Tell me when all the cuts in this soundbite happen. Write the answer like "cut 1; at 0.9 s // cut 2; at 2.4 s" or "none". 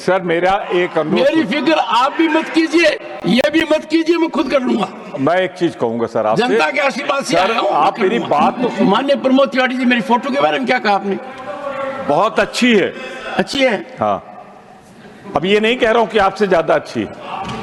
cut 1; at 8.6 s